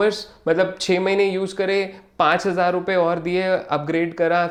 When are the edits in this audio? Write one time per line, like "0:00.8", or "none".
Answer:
none